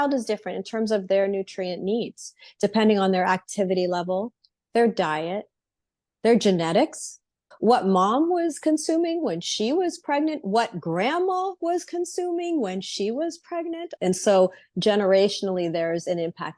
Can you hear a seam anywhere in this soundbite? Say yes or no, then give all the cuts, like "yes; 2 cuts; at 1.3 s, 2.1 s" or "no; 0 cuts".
yes; 1 cut; at 13.9 s